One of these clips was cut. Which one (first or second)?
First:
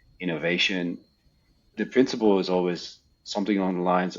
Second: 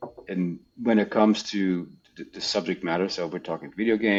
first